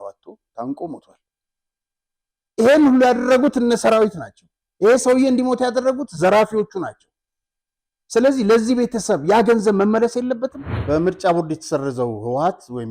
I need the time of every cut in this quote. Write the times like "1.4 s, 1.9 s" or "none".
10.7 s